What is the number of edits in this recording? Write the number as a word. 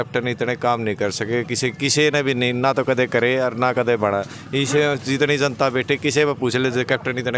zero